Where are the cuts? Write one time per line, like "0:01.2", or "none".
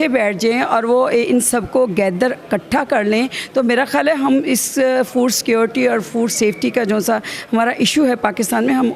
none